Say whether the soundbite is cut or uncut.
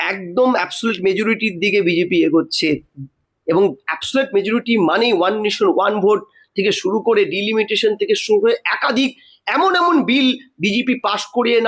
uncut